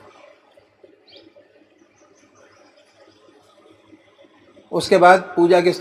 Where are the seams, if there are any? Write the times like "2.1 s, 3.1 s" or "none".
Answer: 3.8 s